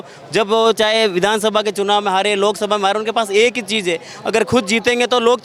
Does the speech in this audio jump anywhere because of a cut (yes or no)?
no